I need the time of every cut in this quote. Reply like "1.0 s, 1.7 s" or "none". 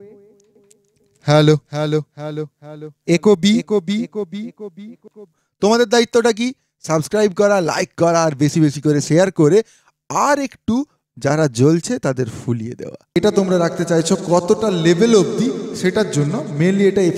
5.4 s, 13.2 s